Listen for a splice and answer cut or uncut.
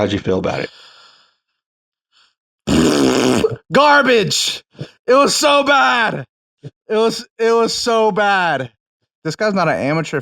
cut